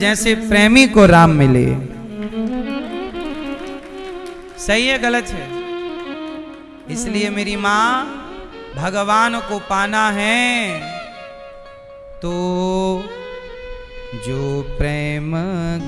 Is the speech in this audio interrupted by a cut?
no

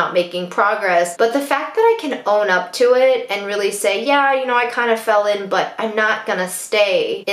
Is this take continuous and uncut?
yes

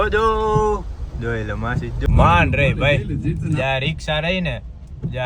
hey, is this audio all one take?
no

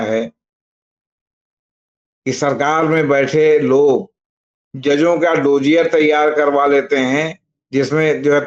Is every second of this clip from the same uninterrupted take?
yes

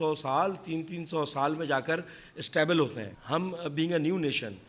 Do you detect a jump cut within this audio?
yes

